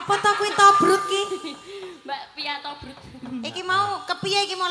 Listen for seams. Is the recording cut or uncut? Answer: uncut